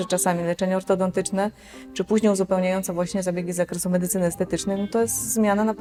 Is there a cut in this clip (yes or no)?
no